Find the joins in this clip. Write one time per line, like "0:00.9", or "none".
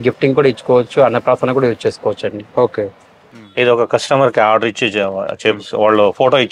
0:03.3